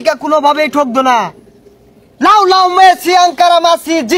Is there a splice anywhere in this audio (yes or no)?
no